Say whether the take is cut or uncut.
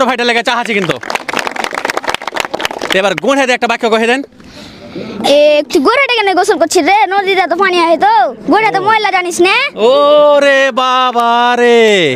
uncut